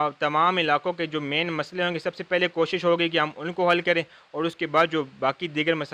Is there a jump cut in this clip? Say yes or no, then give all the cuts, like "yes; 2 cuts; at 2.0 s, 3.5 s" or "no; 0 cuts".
no; 0 cuts